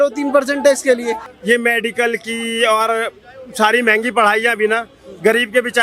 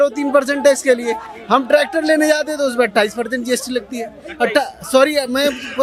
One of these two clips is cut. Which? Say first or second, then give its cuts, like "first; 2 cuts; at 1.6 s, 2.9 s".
first; 1 cut; at 1.3 s